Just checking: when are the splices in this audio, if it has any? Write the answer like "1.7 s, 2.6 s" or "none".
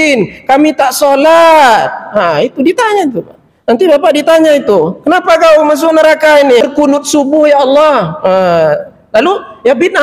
6.6 s